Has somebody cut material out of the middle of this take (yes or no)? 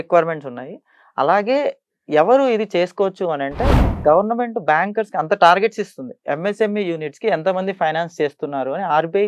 yes